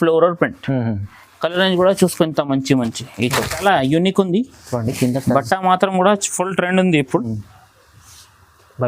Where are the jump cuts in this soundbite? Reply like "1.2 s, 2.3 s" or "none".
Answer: 3.5 s